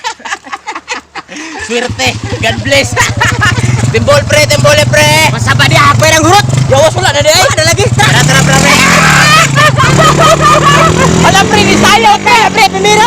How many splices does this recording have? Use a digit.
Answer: 1